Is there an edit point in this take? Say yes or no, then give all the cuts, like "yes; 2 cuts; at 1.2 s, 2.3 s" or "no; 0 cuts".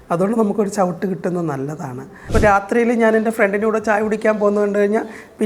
yes; 1 cut; at 2.3 s